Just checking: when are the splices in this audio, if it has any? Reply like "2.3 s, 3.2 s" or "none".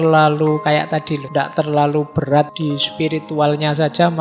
1.2 s, 2.5 s